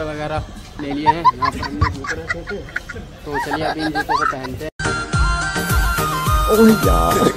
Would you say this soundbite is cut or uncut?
uncut